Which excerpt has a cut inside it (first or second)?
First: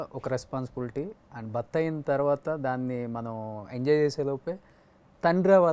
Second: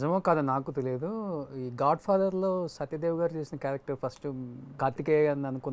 second